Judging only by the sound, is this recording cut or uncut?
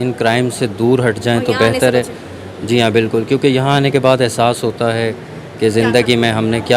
uncut